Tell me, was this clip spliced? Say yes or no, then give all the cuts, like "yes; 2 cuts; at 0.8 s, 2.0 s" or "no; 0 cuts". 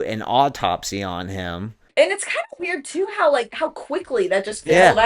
yes; 1 cut; at 1.9 s